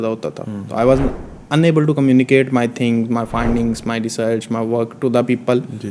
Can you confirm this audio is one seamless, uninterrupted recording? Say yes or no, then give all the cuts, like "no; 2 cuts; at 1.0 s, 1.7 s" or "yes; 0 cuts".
yes; 0 cuts